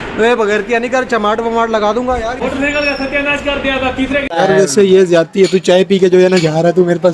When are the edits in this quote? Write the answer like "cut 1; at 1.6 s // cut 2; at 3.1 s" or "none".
cut 1; at 2.4 s // cut 2; at 4.2 s